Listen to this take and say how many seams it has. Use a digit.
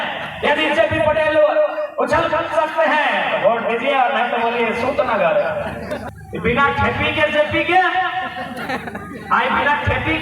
1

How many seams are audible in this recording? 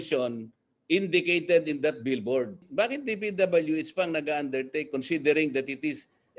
1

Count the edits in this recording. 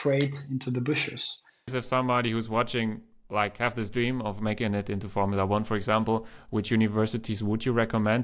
1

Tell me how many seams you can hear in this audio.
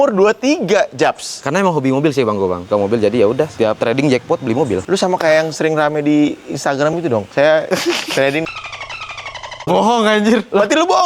2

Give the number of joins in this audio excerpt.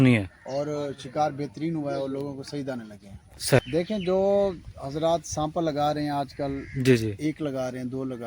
1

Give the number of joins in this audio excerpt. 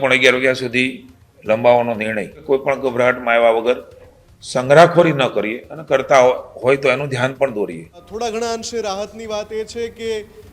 2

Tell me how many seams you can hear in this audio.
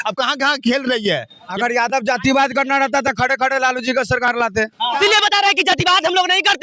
2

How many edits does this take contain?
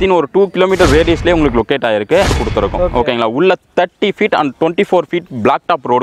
1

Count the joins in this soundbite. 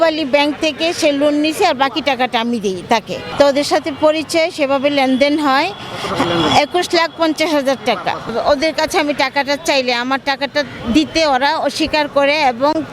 2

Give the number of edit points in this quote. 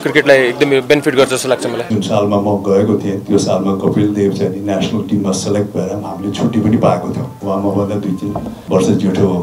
3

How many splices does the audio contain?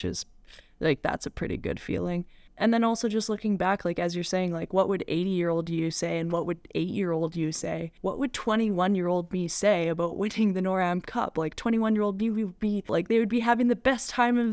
3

